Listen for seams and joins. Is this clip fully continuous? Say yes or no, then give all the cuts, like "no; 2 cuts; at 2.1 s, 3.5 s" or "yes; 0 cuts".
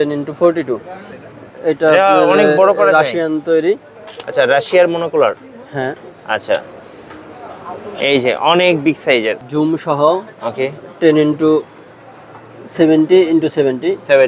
no; 2 cuts; at 1.5 s, 9.4 s